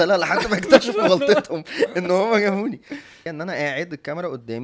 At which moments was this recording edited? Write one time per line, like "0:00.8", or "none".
0:03.3